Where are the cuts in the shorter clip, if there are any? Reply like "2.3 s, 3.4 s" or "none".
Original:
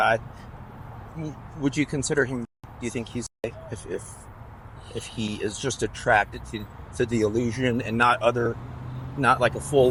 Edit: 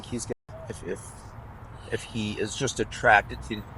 none